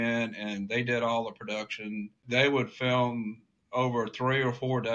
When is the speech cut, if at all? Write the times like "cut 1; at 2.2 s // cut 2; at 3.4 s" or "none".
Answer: cut 1; at 2.1 s